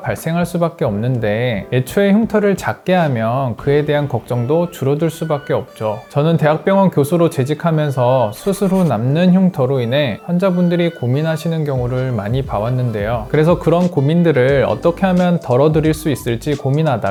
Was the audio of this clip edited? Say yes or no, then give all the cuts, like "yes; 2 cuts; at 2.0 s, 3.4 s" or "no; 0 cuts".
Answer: no; 0 cuts